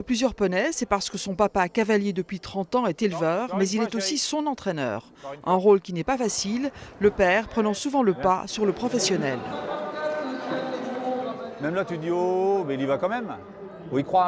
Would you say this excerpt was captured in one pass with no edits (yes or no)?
no